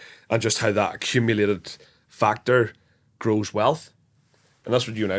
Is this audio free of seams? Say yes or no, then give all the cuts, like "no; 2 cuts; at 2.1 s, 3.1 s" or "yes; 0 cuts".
yes; 0 cuts